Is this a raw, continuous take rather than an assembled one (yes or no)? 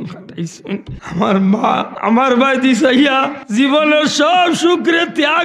no